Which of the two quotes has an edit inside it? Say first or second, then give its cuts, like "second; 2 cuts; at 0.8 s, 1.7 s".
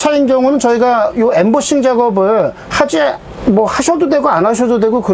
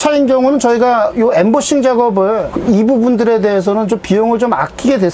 second; 1 cut; at 2.5 s